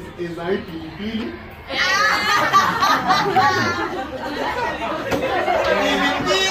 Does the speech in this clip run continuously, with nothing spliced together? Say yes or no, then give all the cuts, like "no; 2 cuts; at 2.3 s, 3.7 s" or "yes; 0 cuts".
yes; 0 cuts